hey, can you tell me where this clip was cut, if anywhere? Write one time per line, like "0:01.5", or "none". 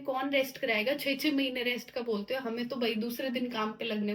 none